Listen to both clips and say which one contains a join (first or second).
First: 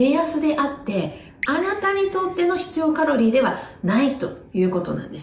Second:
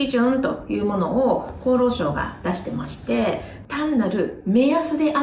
second